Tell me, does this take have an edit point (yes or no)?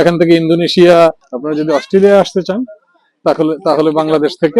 yes